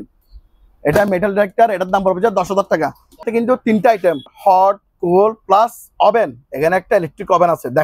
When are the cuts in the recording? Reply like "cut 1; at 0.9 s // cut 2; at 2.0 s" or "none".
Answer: cut 1; at 3.3 s // cut 2; at 4.3 s